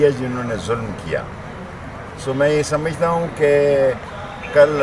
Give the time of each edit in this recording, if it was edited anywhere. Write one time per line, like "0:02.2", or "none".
none